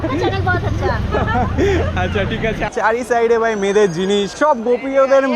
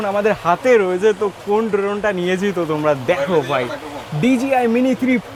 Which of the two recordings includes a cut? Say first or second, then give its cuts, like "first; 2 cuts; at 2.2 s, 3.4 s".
first; 1 cut; at 2.7 s